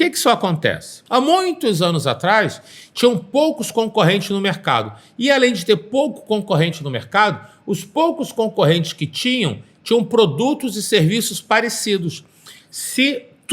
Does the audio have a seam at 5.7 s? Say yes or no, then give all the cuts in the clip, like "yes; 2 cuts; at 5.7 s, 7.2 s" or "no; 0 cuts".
no; 1 cut; at 0.9 s